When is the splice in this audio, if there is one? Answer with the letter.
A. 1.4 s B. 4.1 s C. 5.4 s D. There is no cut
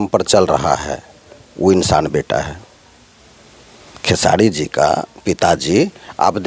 D